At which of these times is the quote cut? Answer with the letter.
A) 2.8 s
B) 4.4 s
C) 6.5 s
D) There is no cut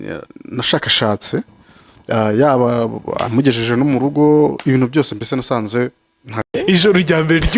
C